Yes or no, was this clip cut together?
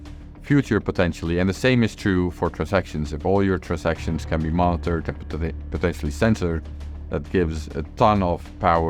no